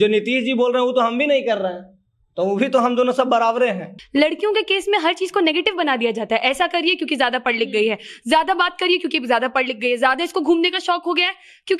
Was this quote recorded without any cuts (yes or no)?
no